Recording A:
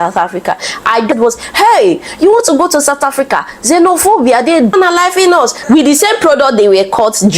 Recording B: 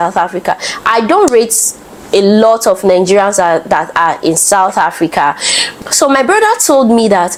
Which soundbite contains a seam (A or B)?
A